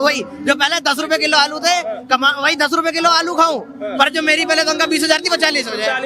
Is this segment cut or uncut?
uncut